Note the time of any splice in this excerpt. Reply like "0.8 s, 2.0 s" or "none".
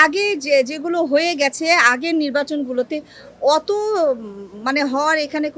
none